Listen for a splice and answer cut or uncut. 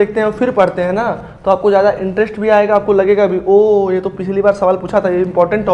uncut